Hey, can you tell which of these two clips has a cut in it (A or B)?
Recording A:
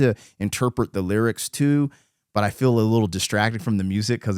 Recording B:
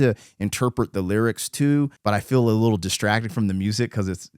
B